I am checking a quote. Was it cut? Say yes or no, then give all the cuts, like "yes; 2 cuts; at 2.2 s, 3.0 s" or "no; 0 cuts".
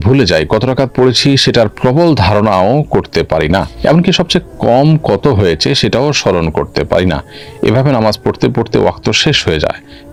no; 0 cuts